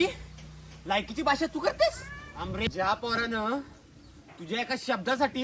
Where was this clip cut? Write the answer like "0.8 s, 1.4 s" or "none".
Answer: 2.6 s